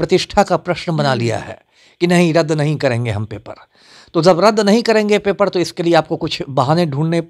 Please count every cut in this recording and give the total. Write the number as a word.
zero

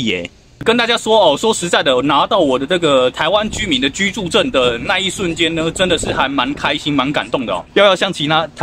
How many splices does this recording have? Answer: one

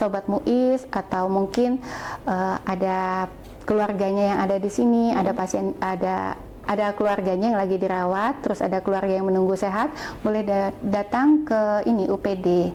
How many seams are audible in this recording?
zero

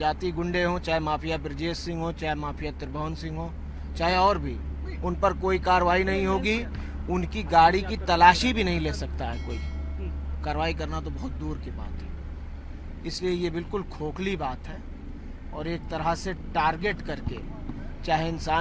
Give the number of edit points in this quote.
zero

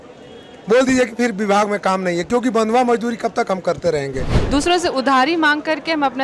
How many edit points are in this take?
one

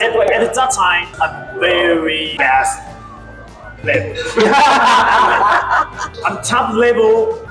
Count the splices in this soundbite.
one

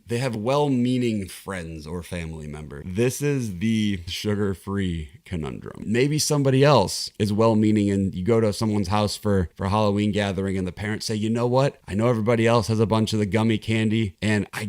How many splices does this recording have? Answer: two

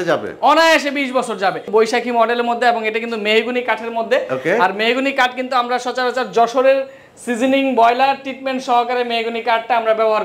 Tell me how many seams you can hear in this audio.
one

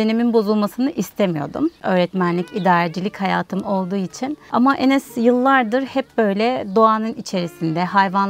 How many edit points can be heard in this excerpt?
two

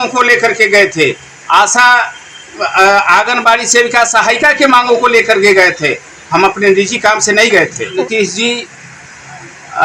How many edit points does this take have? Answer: one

